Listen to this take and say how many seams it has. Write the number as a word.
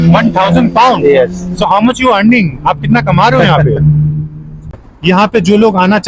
one